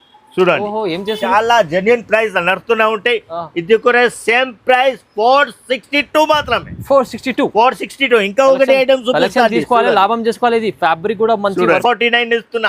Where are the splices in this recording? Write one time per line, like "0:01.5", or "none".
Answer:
0:01.2
0:11.8